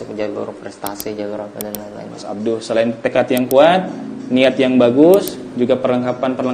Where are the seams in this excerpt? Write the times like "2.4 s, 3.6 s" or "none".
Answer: 2.2 s